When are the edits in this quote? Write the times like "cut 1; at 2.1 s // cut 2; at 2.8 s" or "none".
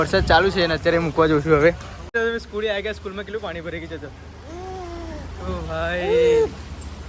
cut 1; at 1.9 s